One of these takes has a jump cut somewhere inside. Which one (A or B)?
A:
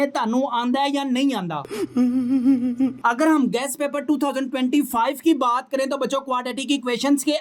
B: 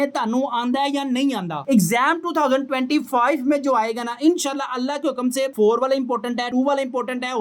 B